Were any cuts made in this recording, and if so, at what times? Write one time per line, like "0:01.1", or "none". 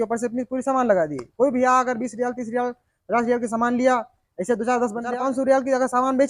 0:05.1

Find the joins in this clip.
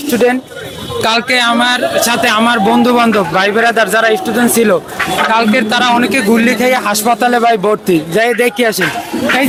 none

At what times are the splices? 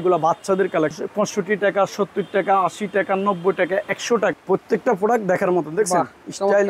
0:01.0
0:04.3

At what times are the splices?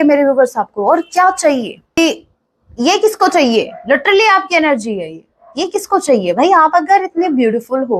0:02.0

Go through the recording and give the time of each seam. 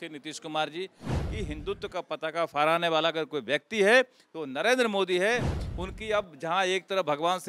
0:01.2
0:05.6

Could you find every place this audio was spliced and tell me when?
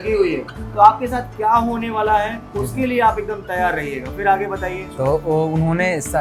none

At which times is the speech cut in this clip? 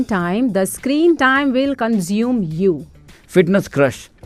none

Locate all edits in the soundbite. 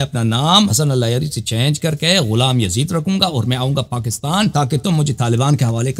0:00.7
0:04.5

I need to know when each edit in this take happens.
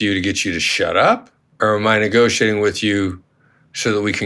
0:01.4

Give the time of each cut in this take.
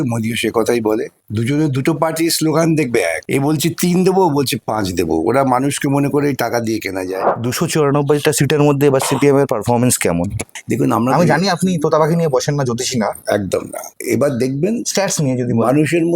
0:07.3

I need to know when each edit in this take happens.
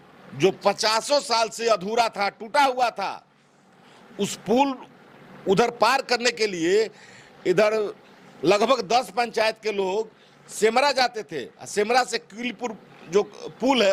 none

